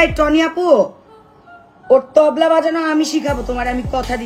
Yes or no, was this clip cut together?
no